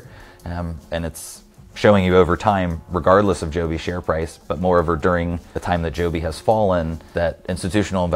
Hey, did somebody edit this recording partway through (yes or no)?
yes